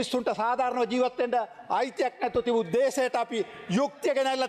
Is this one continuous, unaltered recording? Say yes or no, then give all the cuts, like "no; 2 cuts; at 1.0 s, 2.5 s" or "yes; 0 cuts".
yes; 0 cuts